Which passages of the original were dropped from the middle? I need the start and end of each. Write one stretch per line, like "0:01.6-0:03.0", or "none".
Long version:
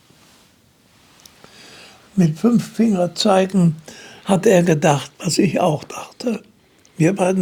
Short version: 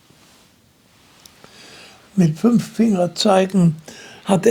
none